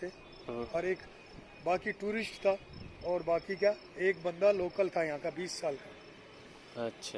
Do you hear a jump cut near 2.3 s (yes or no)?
no